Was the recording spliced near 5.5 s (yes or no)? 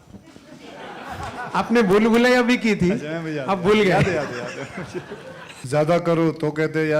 yes